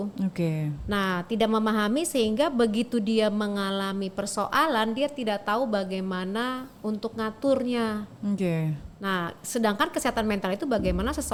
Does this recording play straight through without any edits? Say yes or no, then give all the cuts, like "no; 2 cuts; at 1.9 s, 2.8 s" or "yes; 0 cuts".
yes; 0 cuts